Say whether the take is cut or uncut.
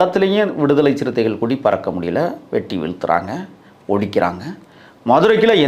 uncut